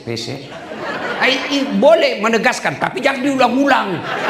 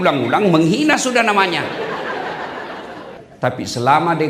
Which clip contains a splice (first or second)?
second